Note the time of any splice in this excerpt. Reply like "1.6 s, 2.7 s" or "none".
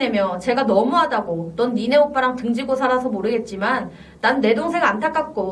none